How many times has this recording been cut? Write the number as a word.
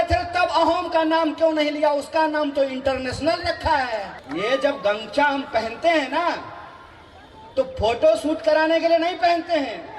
one